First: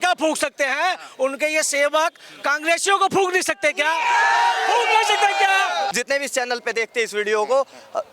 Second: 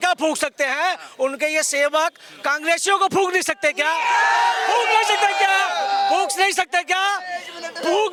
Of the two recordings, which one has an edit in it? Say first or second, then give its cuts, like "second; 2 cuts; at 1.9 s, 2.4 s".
first; 1 cut; at 5.9 s